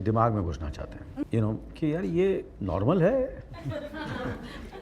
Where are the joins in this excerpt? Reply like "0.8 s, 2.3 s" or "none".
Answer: 1.2 s